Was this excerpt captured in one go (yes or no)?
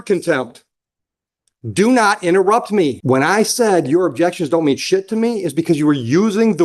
no